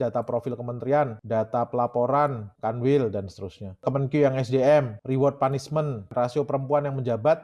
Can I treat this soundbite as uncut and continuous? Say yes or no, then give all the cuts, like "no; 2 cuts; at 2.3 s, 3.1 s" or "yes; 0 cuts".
no; 5 cuts; at 1.2 s, 2.5 s, 3.9 s, 5.0 s, 6.1 s